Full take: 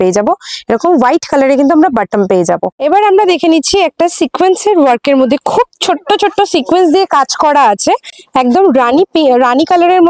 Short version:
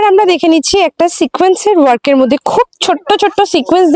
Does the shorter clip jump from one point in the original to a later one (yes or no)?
no